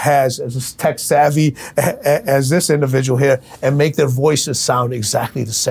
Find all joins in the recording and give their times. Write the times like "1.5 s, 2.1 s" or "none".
none

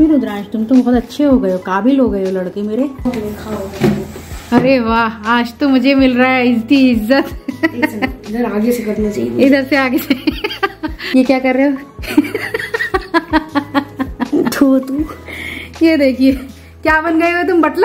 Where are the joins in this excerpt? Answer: 3.0 s, 10.9 s

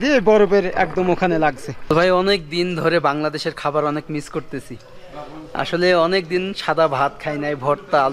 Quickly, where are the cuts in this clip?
1.7 s

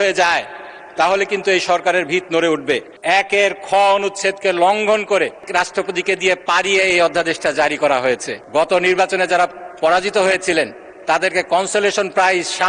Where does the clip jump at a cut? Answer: 2.9 s, 5.5 s, 8.3 s

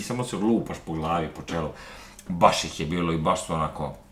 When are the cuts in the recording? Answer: none

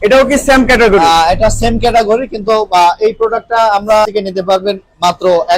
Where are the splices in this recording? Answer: 4.1 s

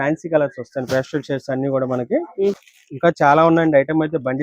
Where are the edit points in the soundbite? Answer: 2.6 s

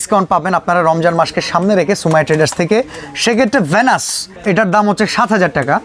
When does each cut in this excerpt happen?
none

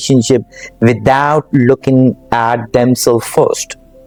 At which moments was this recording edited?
none

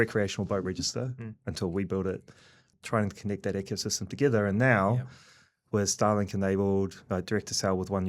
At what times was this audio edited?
2.7 s

